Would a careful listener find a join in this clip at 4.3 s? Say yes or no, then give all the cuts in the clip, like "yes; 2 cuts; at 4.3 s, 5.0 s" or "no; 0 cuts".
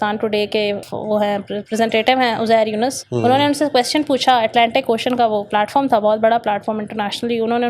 no; 2 cuts; at 0.8 s, 3.0 s